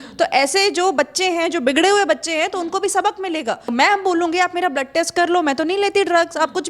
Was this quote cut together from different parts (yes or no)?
yes